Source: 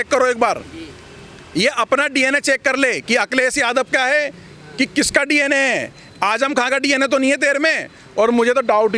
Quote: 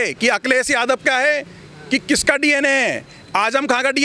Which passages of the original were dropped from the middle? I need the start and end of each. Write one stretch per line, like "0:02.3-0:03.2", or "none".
none